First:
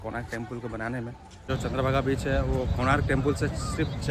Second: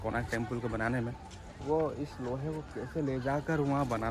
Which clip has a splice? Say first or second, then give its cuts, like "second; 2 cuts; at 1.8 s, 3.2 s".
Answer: first; 1 cut; at 1.5 s